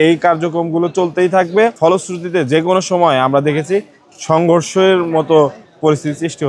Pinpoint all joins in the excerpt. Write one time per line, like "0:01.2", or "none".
0:01.7